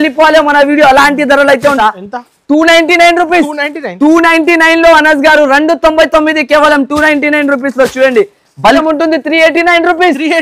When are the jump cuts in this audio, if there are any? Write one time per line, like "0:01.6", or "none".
0:01.8
0:08.8